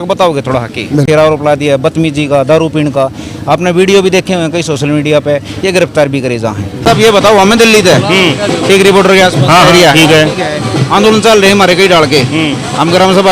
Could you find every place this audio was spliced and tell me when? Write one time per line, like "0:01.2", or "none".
0:01.1
0:06.8